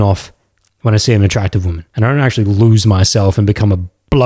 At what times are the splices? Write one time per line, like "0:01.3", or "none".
0:01.8